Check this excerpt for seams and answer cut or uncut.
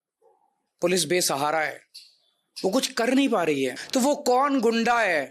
cut